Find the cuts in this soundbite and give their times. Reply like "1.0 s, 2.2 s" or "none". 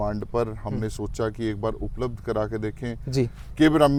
none